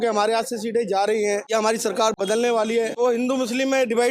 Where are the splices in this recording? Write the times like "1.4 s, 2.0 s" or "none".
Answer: 1.4 s, 2.9 s